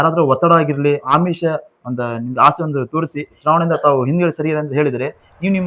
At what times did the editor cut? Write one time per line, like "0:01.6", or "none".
0:01.1
0:03.4